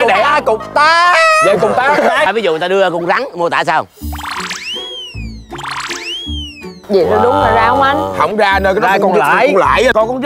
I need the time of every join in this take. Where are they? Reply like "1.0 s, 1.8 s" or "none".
2.3 s